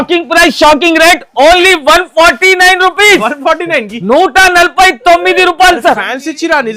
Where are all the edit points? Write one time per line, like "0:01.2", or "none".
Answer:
none